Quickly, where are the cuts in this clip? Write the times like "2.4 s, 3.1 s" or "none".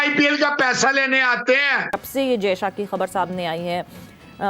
2.0 s